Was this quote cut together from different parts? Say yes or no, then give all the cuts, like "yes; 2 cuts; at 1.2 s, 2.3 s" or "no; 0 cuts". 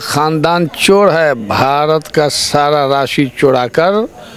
no; 0 cuts